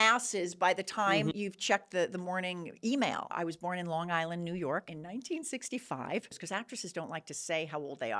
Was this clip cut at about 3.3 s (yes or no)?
yes